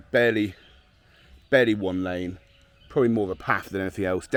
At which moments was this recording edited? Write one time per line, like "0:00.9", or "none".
none